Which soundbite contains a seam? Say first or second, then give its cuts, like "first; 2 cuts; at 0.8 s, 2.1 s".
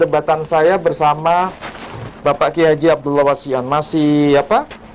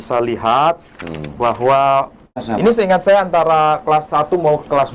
second; 1 cut; at 2.5 s